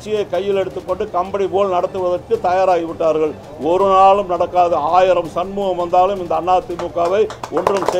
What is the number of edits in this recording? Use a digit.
0